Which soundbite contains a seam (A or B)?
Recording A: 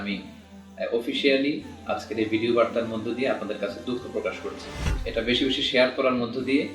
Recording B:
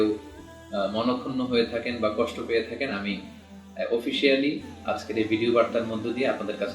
A